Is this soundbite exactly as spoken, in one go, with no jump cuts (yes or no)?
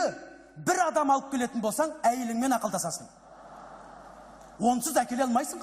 no